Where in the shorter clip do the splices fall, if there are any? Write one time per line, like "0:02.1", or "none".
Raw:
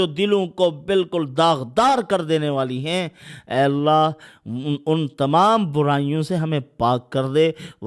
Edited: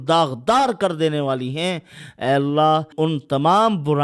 0:02.9